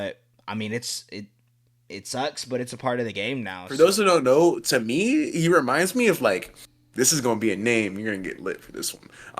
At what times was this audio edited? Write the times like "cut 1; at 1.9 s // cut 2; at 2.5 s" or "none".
cut 1; at 3.6 s